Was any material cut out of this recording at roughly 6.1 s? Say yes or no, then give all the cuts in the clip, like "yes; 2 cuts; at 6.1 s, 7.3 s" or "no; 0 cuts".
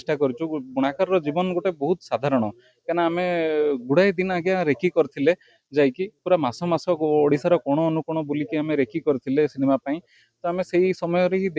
no; 0 cuts